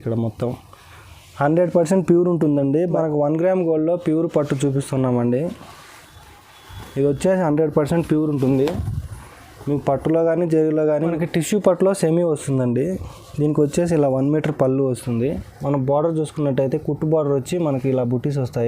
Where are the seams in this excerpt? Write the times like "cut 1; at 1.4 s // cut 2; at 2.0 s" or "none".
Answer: cut 1; at 2.9 s // cut 2; at 11.0 s

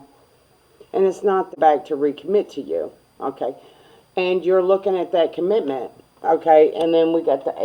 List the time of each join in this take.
cut 1; at 1.5 s

